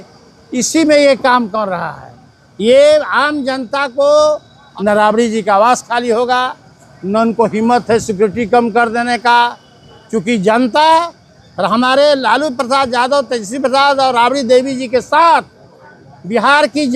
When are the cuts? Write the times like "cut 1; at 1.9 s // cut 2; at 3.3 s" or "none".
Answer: none